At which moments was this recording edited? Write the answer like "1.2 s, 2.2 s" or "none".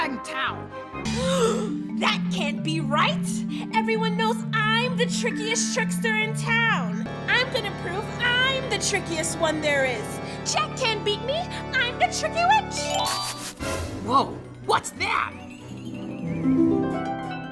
1.0 s, 7.1 s, 13.0 s

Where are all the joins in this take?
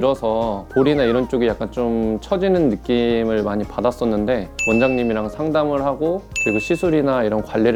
none

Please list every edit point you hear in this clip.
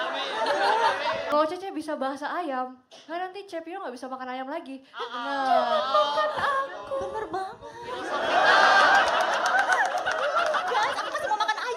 1.3 s

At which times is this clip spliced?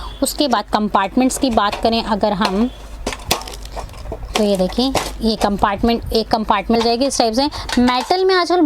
6.8 s

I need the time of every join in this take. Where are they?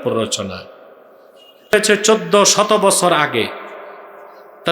1.7 s

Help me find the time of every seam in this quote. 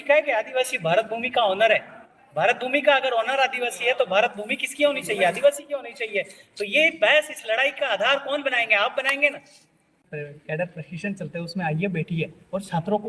10.1 s

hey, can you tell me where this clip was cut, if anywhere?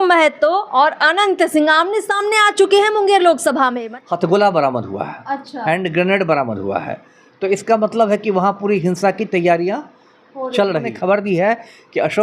3.9 s, 10.9 s

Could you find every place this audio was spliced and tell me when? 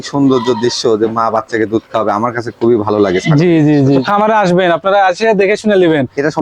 4.0 s

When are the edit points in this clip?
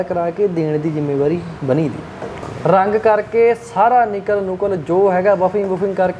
2.5 s

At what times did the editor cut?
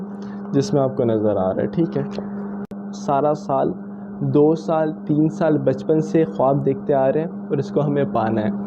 2.8 s

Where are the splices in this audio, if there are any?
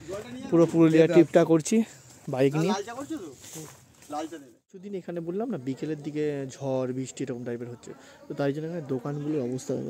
4.8 s

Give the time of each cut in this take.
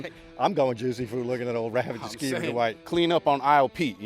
2.8 s

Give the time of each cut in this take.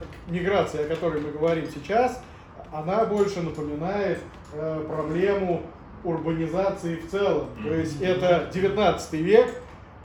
none

